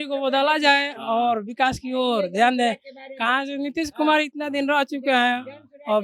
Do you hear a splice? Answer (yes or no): no